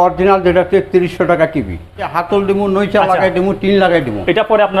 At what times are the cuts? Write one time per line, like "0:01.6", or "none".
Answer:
0:02.1